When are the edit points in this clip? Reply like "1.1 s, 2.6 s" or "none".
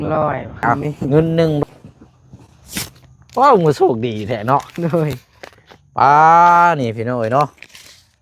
1.6 s